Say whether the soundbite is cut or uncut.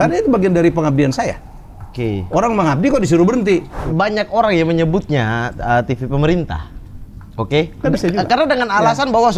cut